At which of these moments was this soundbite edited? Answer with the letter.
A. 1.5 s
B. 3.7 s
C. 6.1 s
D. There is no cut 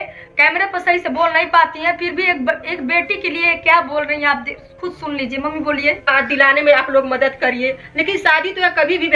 C